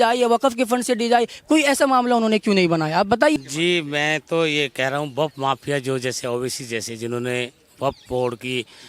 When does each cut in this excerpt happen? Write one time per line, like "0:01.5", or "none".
0:03.4